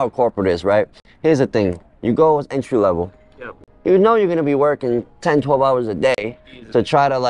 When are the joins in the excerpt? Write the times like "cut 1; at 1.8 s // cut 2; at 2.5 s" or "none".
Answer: none